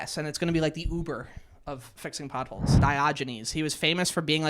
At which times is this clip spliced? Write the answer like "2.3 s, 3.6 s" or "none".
2.8 s